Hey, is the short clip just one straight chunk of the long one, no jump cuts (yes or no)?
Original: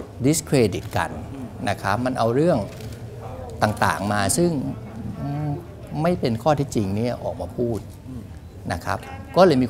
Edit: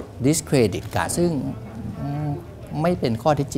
no